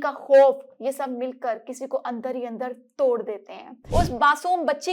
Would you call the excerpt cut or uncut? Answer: cut